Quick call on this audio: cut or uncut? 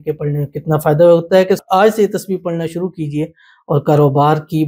cut